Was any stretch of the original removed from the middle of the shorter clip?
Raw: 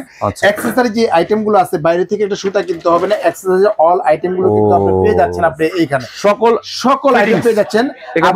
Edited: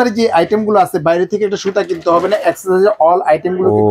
no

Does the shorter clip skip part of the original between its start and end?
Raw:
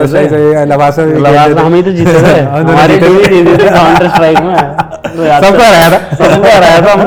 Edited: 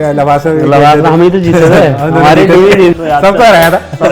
yes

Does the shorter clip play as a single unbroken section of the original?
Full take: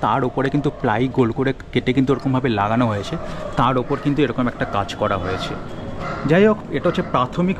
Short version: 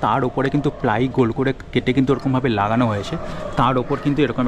yes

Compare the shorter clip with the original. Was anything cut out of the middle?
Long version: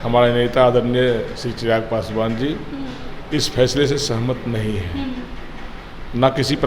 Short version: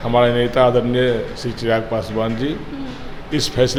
no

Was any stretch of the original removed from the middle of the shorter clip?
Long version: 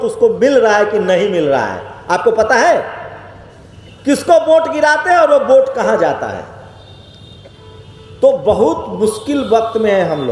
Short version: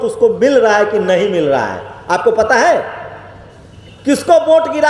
no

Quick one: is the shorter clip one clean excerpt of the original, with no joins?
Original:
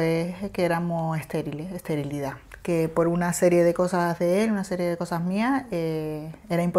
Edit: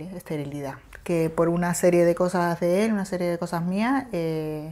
yes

